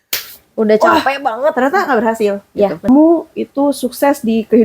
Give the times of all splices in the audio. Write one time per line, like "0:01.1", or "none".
0:02.9